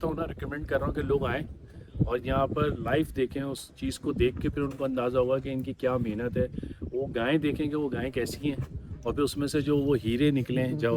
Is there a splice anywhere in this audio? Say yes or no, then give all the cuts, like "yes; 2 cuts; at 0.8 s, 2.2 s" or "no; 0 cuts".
no; 0 cuts